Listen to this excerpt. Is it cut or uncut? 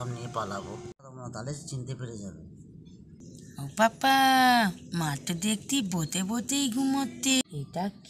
cut